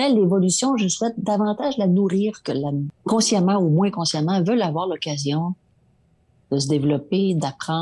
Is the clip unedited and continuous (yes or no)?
no